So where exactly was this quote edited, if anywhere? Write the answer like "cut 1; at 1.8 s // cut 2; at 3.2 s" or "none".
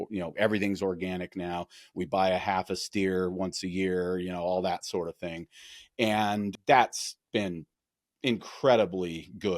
cut 1; at 6.6 s